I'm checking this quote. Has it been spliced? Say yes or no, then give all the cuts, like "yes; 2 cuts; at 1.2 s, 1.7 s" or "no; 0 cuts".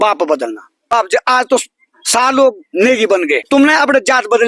yes; 2 cuts; at 0.9 s, 3.4 s